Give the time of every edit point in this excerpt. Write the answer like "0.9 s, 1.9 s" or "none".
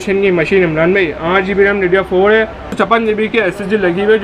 2.7 s